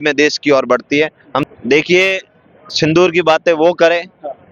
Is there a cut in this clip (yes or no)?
yes